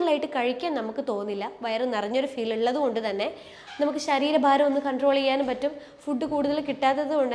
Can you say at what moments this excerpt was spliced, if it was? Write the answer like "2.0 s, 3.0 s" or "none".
none